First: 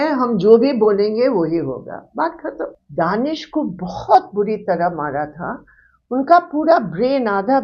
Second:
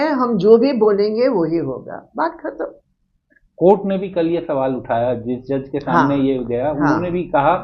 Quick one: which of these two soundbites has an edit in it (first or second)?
first